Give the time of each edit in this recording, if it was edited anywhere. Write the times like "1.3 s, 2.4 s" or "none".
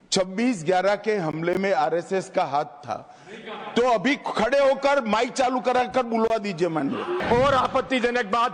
7.2 s